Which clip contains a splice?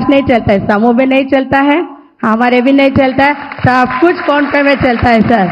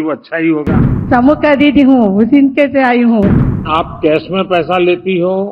second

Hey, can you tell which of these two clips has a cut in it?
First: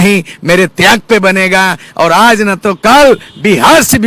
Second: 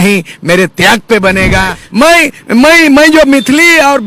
second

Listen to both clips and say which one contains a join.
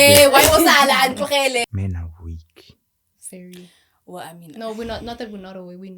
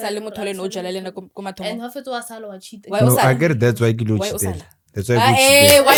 first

